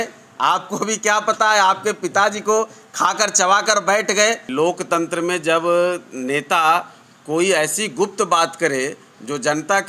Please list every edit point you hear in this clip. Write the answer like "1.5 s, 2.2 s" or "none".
4.5 s

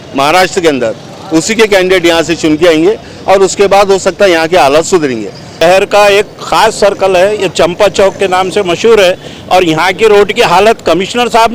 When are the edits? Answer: 5.4 s

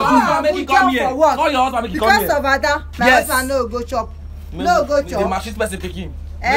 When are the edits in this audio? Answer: none

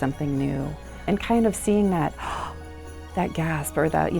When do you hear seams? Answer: 1.0 s

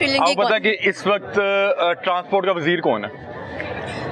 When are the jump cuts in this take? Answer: none

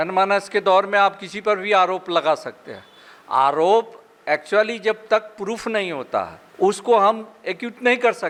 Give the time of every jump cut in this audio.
none

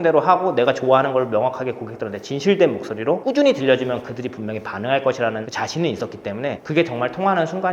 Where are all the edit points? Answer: 5.5 s

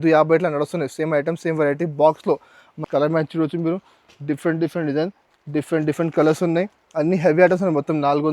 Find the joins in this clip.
2.7 s

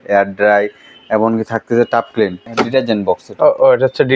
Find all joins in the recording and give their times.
2.4 s

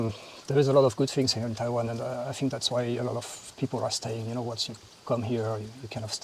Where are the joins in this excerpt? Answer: none

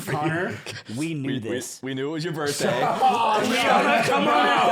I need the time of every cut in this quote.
none

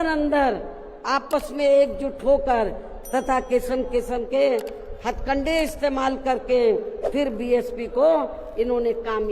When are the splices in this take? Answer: none

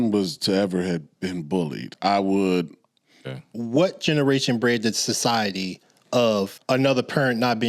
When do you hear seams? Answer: 1.8 s, 3.2 s, 6.6 s

